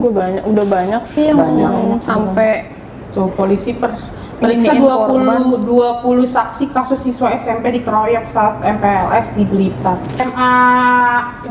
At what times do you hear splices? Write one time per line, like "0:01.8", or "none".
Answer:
0:10.2